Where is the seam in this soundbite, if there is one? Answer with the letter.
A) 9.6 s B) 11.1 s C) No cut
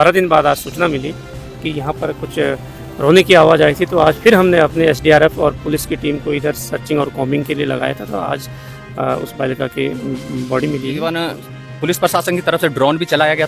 B